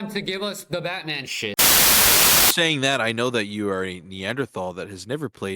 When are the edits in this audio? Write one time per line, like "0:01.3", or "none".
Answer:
0:01.5
0:02.5